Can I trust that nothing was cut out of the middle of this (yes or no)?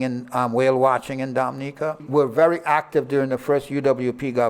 no